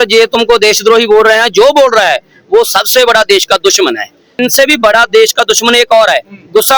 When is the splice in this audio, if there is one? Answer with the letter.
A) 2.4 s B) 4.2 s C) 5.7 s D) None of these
B